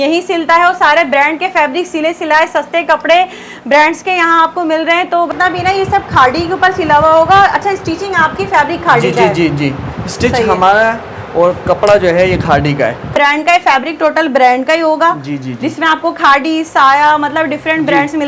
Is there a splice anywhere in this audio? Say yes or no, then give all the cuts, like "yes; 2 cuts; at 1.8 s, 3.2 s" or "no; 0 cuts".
yes; 2 cuts; at 5.3 s, 13.1 s